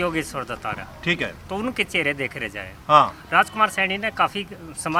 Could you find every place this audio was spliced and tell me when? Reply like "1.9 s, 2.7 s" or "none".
none